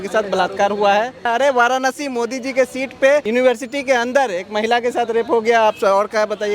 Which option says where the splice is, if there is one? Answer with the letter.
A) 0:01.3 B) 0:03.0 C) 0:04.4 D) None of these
A